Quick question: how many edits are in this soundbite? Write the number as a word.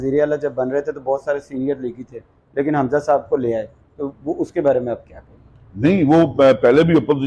zero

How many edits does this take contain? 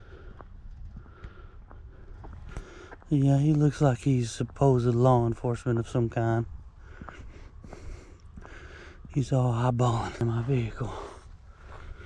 one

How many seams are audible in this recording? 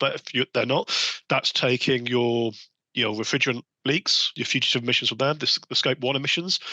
one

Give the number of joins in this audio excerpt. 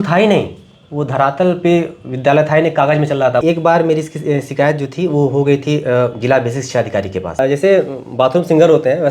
two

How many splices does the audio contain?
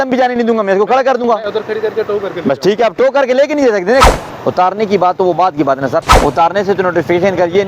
two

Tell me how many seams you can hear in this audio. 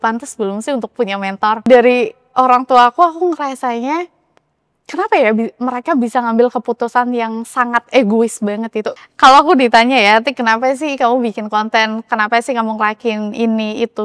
two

